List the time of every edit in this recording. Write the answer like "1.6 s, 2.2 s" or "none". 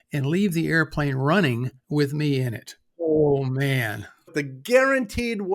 3.0 s, 4.3 s